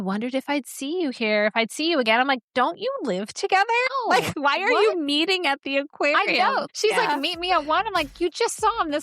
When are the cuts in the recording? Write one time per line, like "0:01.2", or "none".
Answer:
0:04.3
0:06.7